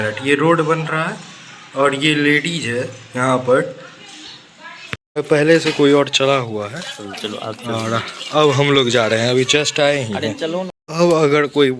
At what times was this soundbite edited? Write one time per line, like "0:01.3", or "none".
0:05.0